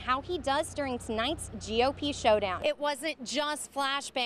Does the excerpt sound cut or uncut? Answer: cut